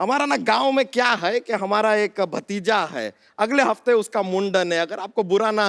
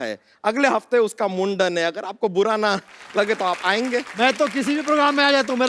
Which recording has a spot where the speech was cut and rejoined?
second; 1 cut; at 4.1 s

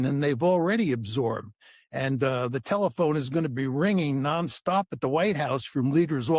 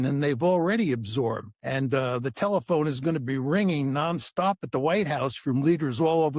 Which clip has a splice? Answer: second; 1 cut; at 1.5 s

